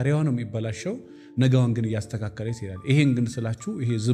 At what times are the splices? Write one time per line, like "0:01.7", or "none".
none